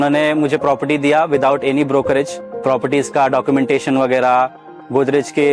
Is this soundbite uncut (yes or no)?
no